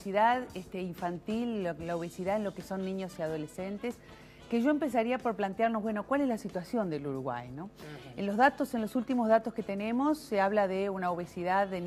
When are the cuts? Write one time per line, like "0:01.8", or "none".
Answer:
0:03.6